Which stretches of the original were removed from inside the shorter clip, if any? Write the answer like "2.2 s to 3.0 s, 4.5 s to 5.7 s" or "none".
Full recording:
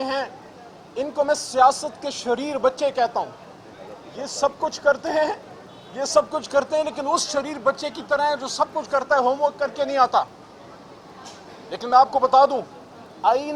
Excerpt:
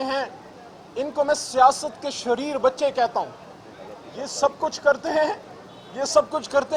none